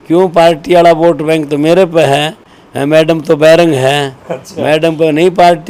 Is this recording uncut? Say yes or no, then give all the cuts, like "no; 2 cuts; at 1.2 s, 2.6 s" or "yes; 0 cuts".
yes; 0 cuts